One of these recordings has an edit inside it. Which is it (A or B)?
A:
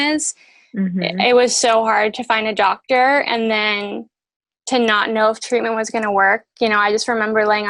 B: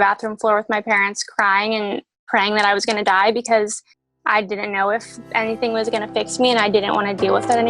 B